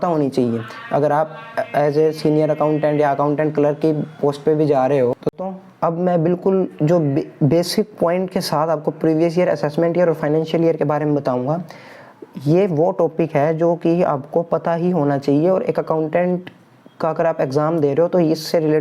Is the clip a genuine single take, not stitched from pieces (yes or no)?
no